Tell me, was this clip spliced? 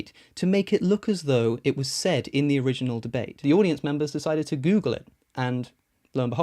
yes; 1 cut; at 3.3 s

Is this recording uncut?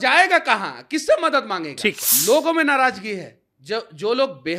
no; 1 cut; at 2.1 s

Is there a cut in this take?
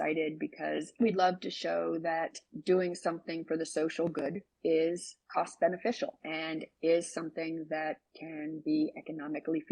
yes; 2 cuts; at 5.1 s, 6.2 s

